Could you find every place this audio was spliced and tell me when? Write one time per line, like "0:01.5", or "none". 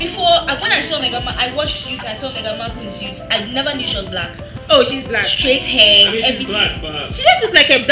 none